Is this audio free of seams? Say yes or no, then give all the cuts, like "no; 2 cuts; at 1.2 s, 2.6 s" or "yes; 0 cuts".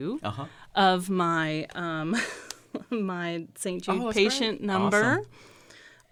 yes; 0 cuts